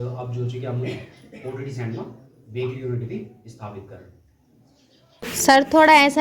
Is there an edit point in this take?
yes; 1 cut; at 5.3 s

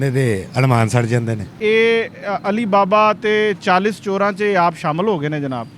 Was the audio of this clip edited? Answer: yes; 1 cut; at 1.6 s

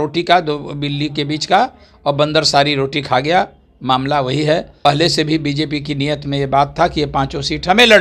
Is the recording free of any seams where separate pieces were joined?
no; 1 cut; at 4.7 s

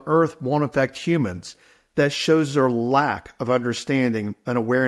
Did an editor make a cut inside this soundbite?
no; 0 cuts

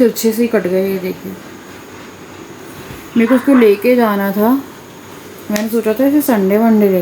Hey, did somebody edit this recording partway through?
no; 0 cuts

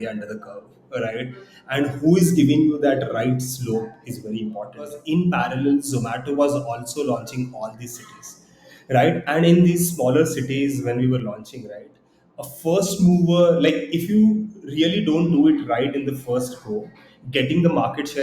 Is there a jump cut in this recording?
yes; 1 cut; at 5.0 s

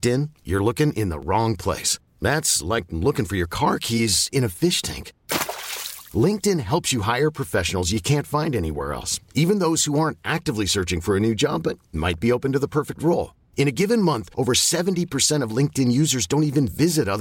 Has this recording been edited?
no; 0 cuts

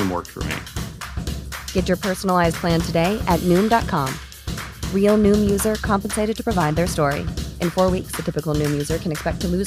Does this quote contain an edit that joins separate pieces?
no; 0 cuts

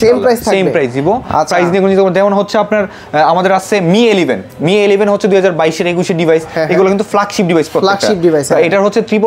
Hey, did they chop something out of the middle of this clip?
no; 0 cuts

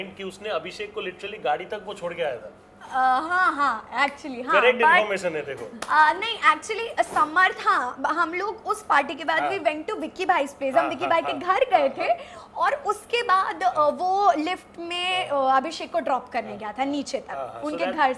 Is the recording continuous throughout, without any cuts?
yes; 0 cuts

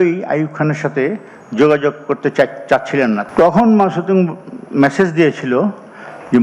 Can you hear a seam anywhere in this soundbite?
yes; 1 cut; at 3.2 s

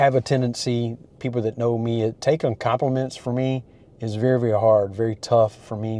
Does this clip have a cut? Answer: no; 0 cuts

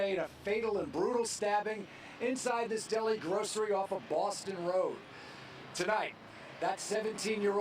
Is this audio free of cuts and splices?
no; 1 cut; at 3.8 s

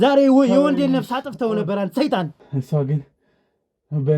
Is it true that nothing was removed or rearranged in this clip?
no; 1 cut; at 2.4 s

